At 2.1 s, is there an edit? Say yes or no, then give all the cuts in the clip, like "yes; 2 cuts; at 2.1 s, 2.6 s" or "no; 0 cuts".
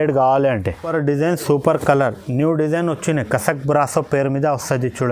no; 1 cut; at 0.9 s